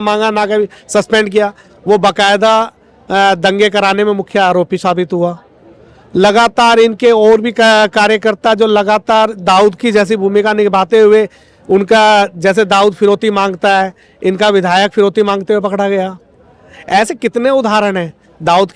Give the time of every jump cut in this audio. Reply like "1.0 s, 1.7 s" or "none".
none